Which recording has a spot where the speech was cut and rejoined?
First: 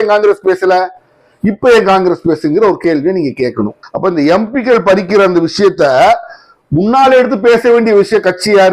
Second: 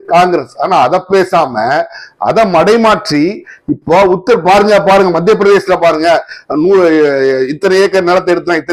first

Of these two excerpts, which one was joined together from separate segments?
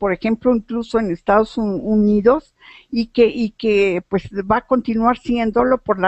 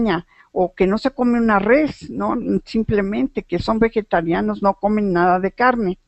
second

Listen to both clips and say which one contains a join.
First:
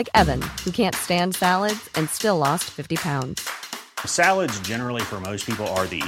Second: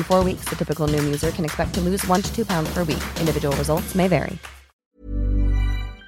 second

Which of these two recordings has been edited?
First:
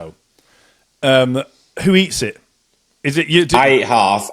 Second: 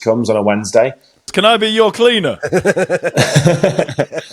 second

